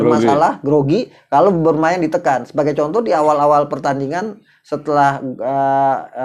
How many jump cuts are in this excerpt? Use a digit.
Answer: 0